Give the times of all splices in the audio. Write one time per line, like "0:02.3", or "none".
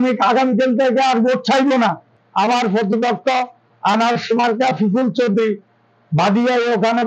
0:02.1